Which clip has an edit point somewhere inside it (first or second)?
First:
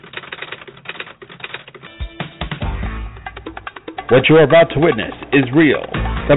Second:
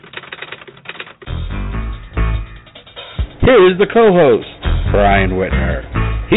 first